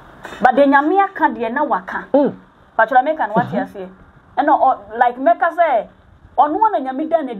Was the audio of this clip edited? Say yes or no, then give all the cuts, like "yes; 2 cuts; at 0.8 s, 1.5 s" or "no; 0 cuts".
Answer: no; 0 cuts